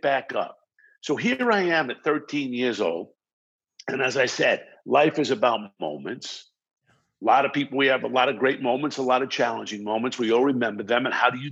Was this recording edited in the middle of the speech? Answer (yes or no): no